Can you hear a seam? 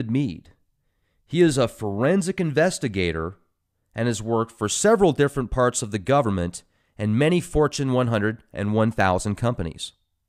no; 0 cuts

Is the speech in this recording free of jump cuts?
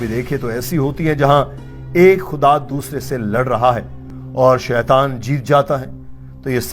yes; 0 cuts

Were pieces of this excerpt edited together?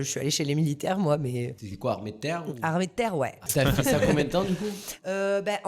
yes; 2 cuts; at 1.6 s, 3.5 s

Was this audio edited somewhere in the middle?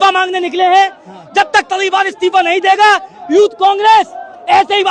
no; 0 cuts

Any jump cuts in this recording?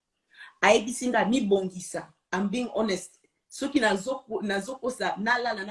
no; 0 cuts

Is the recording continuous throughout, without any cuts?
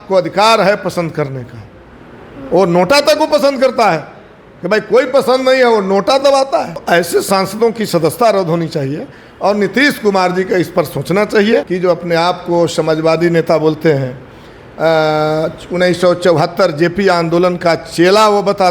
no; 2 cuts; at 6.8 s, 11.7 s

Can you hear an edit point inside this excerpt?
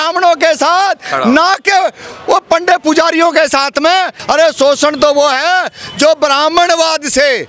yes; 1 cut; at 4.2 s

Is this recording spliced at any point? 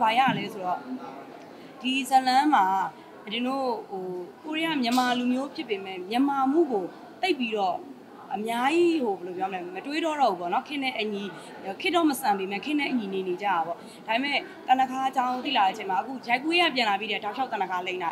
no; 0 cuts

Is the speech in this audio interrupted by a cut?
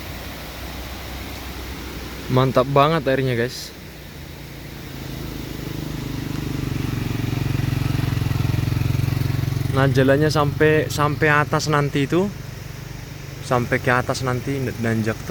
no; 0 cuts

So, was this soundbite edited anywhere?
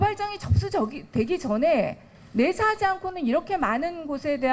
no; 0 cuts

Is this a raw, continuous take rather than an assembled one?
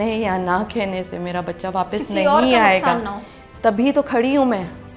yes; 0 cuts

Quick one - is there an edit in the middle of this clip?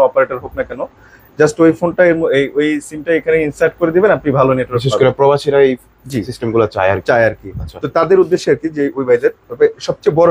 no; 0 cuts

